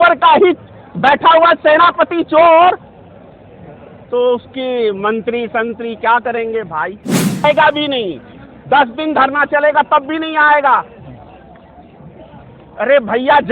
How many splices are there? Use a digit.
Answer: 1